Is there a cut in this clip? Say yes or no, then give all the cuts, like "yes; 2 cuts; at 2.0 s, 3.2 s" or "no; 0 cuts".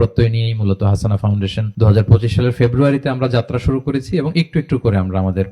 yes; 1 cut; at 1.7 s